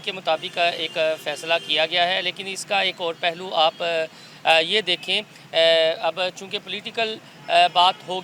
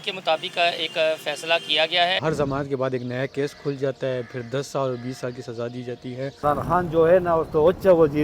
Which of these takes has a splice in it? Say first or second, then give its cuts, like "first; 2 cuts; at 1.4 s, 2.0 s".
second; 2 cuts; at 2.2 s, 6.3 s